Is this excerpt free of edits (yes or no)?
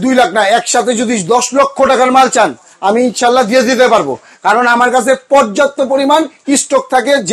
yes